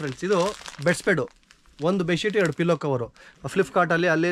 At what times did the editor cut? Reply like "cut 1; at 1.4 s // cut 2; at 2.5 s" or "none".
cut 1; at 3.3 s